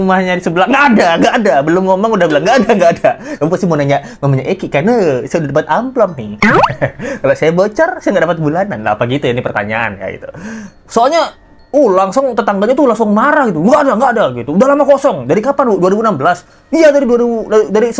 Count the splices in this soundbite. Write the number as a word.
zero